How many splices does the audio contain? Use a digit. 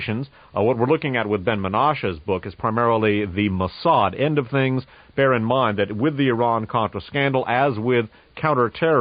1